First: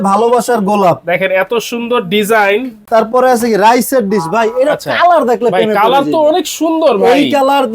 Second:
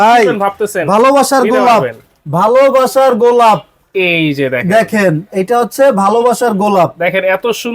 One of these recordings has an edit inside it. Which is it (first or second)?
first